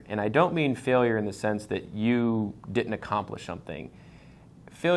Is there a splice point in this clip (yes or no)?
no